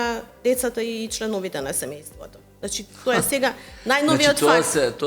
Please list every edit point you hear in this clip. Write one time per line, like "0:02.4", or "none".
none